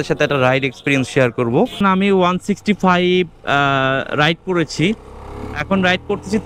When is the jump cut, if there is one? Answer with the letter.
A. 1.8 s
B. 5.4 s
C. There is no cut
A